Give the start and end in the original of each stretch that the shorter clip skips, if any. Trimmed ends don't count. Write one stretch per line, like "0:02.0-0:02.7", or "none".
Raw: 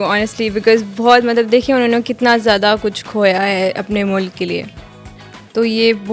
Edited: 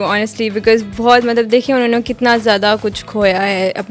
none